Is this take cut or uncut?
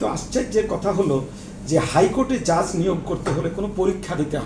uncut